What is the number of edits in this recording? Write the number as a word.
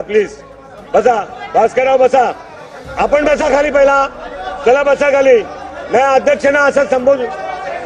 zero